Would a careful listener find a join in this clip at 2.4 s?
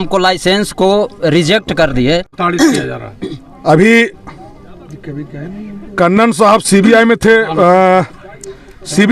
yes; 1 cut; at 2.4 s

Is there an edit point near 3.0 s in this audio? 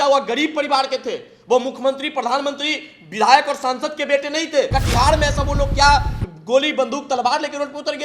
no; 1 cut; at 4.7 s

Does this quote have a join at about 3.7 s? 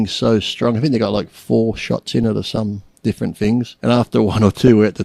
yes; 1 cut; at 3.7 s

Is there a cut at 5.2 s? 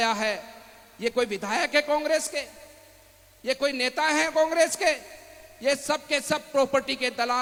no; 0 cuts

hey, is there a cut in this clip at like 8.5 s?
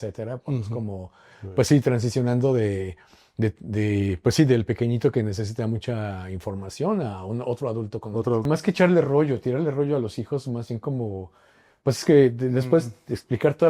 yes; 1 cut; at 8.5 s

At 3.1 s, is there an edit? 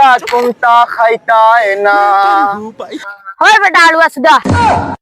yes; 1 cut; at 3.1 s

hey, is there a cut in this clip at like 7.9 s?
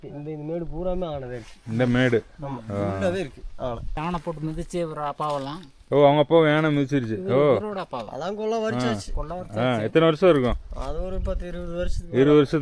no; 1 cut; at 4.0 s

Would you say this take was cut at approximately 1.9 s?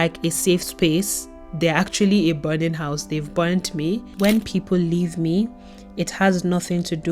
no; 1 cut; at 4.1 s

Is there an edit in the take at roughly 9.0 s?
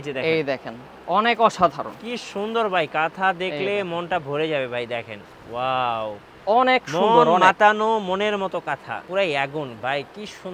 yes; 1 cut; at 9.0 s

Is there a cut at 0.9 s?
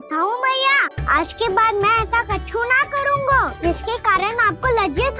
yes; 2 cuts; at 0.9 s, 3.5 s

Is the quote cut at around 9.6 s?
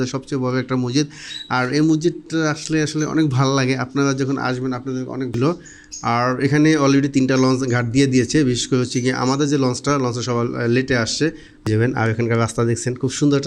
no; 2 cuts; at 5.4 s, 11.7 s

